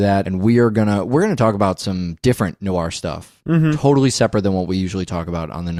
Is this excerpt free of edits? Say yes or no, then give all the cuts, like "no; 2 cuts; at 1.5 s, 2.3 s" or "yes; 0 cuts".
yes; 0 cuts